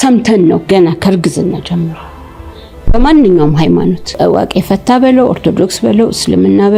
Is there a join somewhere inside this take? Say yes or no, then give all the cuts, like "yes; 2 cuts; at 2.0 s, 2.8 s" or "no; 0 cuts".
no; 0 cuts